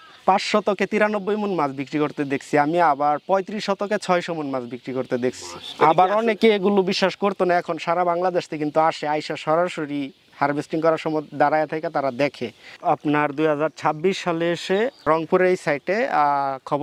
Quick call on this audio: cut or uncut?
uncut